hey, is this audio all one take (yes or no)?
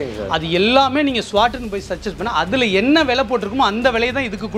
yes